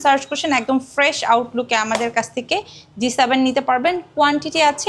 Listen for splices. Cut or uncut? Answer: uncut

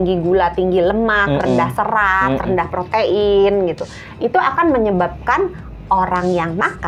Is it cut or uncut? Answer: uncut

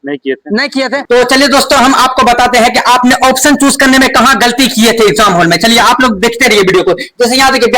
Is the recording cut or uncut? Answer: cut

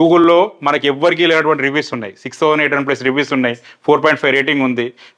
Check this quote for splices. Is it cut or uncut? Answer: uncut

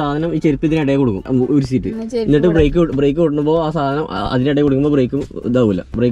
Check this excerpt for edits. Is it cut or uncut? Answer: cut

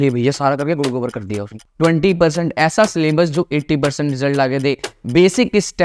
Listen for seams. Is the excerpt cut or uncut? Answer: cut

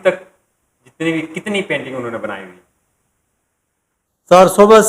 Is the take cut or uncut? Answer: uncut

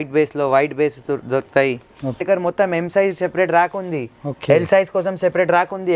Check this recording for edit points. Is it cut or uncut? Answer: cut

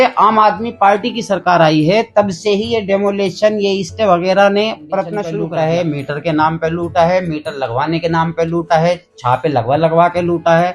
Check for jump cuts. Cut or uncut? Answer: cut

